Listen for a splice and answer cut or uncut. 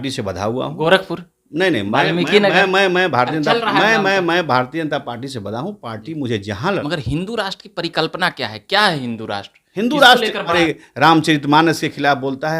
cut